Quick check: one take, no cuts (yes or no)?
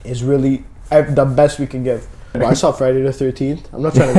no